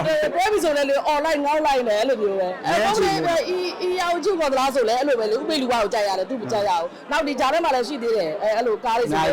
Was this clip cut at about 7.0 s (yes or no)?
no